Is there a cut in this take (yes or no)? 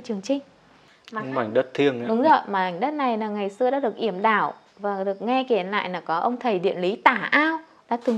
yes